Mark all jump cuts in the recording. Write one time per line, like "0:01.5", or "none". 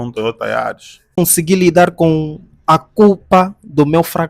0:01.1

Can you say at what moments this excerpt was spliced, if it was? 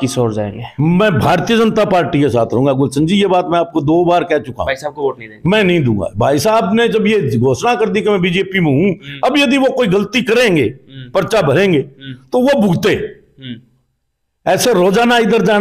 none

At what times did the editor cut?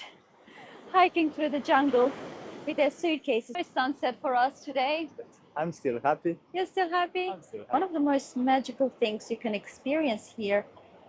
0:03.7
0:07.6

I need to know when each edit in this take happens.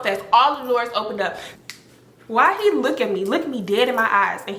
0:01.4

